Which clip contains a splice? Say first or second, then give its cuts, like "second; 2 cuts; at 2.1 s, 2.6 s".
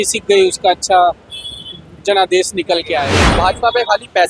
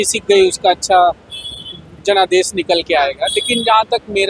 first; 1 cut; at 3.2 s